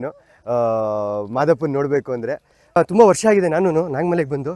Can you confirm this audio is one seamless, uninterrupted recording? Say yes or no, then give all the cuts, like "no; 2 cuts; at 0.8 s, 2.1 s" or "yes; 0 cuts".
no; 1 cut; at 2.8 s